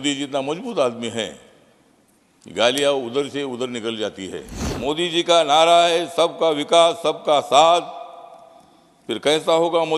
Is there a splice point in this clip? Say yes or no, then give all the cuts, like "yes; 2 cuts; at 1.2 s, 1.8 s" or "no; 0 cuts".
yes; 1 cut; at 4.6 s